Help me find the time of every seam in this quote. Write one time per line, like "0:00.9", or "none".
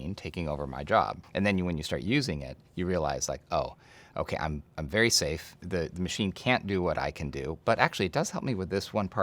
0:01.2